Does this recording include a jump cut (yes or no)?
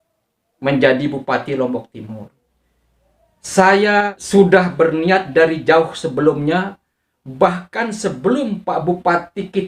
yes